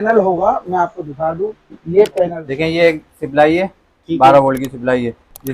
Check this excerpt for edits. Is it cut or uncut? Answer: cut